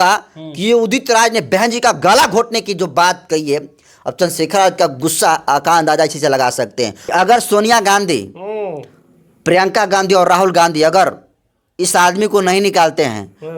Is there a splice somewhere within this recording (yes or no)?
yes